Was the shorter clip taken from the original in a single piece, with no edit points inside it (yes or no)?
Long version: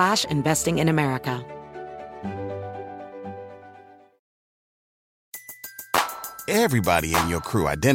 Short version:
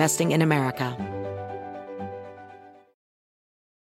no